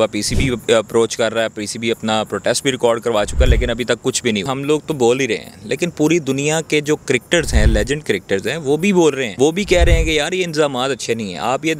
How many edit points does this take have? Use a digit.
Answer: 2